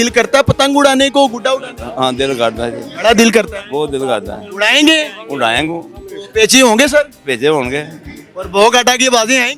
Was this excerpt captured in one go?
yes; 0 cuts

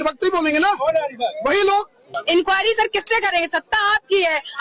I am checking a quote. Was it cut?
yes; 1 cut; at 2.1 s

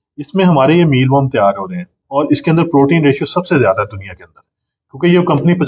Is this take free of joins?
no; 1 cut; at 2.0 s

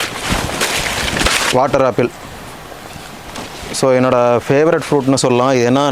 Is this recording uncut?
no; 1 cut; at 1.4 s

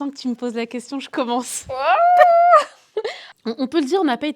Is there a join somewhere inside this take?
yes; 1 cut; at 3.2 s

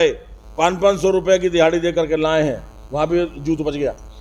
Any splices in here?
no; 0 cuts

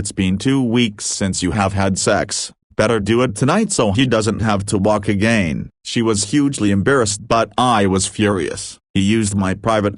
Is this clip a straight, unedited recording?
yes; 0 cuts

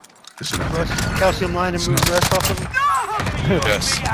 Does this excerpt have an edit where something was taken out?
no; 0 cuts

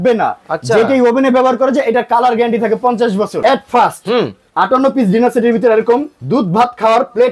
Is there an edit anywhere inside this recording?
yes; 1 cut; at 3.3 s

